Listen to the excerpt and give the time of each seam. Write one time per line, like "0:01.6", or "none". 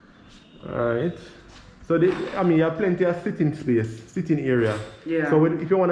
none

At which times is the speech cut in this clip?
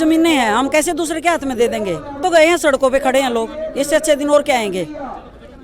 0:02.2

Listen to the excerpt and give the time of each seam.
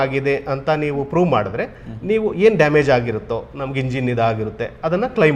none

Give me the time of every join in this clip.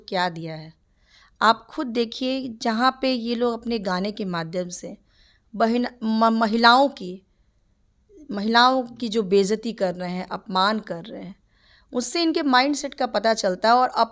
none

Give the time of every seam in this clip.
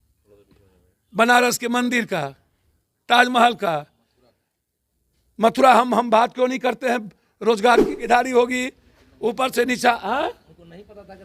0:08.0

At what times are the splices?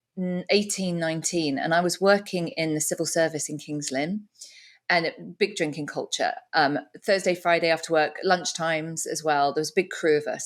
none

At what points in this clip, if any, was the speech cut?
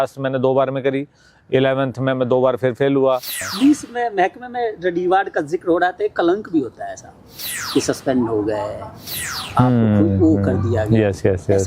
0:03.4

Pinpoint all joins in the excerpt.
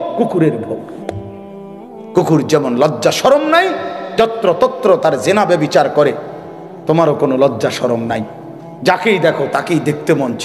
none

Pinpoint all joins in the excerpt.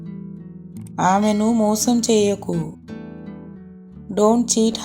0:00.9
0:02.8
0:04.1

